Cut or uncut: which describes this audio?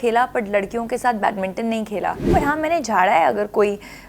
cut